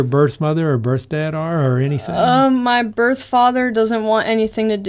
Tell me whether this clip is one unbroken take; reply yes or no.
yes